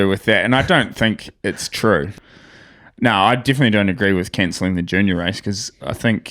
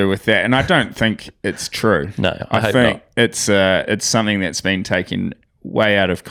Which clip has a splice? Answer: first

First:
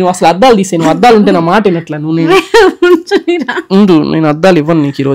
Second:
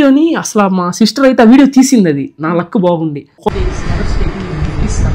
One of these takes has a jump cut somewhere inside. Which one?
second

